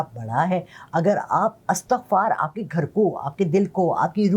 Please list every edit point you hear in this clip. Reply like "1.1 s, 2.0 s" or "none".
none

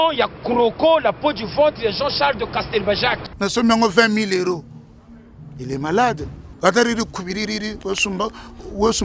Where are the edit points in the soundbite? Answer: 3.3 s

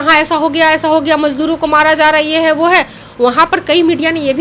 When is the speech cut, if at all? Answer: none

